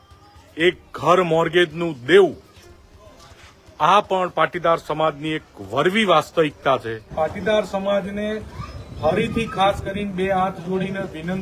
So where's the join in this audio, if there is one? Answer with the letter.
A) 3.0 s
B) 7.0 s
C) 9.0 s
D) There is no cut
B